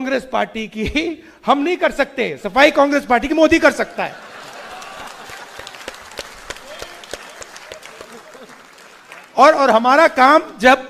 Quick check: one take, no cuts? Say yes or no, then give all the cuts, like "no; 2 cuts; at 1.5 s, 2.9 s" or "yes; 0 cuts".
yes; 0 cuts